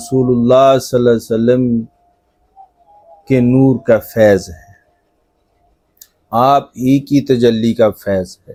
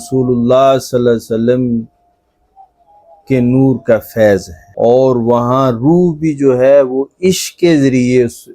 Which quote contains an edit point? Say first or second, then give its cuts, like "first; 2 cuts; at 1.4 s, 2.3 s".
second; 1 cut; at 4.6 s